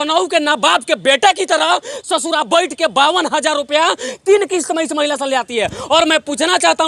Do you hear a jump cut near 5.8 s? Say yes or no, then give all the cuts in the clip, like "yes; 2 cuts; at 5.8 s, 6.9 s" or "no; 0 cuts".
no; 0 cuts